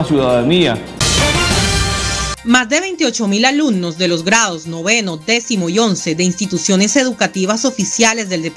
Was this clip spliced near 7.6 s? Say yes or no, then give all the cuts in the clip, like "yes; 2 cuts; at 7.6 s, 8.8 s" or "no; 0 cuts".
no; 2 cuts; at 0.9 s, 2.3 s